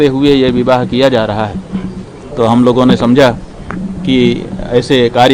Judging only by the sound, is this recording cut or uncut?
uncut